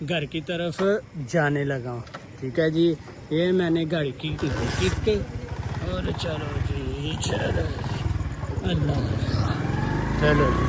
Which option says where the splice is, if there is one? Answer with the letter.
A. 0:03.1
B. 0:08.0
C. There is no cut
C